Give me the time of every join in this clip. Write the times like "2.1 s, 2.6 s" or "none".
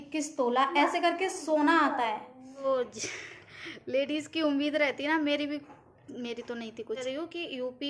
2.6 s, 7.0 s